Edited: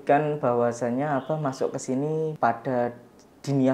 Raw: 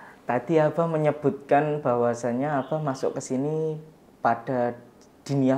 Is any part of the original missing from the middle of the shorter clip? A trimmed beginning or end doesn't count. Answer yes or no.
yes